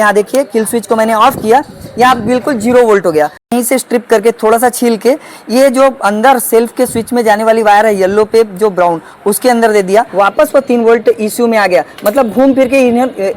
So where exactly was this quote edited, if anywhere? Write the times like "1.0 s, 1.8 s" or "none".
3.5 s, 10.1 s